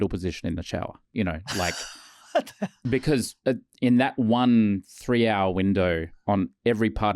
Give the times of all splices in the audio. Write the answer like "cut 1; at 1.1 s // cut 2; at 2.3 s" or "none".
cut 1; at 1.0 s // cut 2; at 2.8 s // cut 3; at 6.1 s